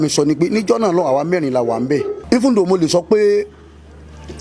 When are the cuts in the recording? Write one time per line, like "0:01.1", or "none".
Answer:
0:02.2